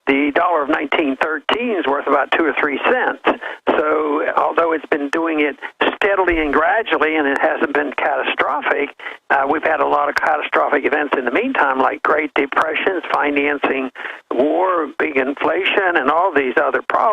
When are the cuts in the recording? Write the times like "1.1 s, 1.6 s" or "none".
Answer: 9.1 s